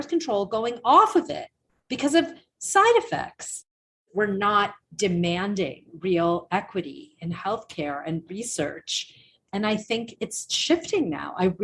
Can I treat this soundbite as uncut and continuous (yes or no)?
no